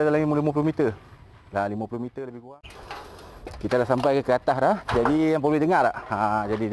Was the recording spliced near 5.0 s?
no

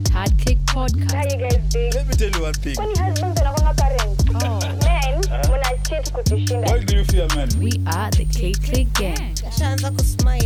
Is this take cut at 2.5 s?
no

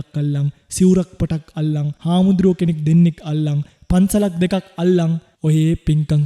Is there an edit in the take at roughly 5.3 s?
yes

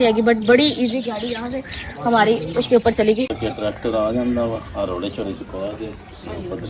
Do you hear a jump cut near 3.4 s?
yes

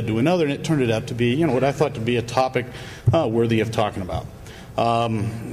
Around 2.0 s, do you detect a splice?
yes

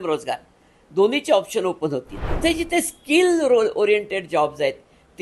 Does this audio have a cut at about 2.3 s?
yes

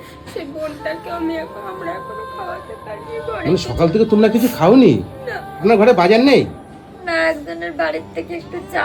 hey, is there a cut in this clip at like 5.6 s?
yes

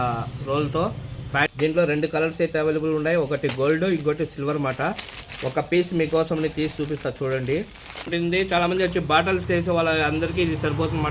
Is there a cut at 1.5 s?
yes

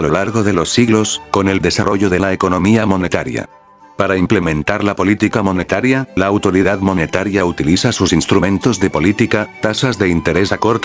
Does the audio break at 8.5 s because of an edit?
no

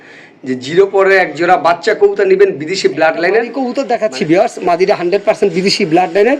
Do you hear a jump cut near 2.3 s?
no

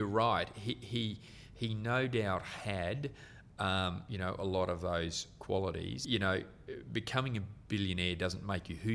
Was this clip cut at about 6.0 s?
yes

